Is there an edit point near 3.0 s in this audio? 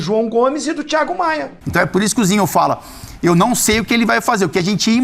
no; 1 cut; at 1.6 s

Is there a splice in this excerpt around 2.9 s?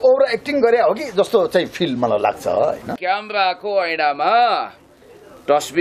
yes; 1 cut; at 2.9 s

